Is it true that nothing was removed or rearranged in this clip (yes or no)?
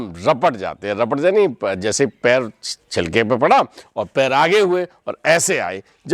yes